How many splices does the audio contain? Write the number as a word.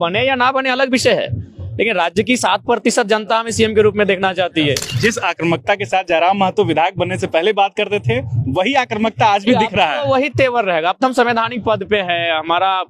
one